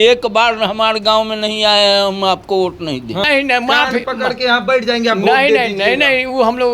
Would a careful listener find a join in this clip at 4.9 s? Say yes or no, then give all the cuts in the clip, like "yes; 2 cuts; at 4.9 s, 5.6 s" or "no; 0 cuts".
no; 1 cut; at 3.2 s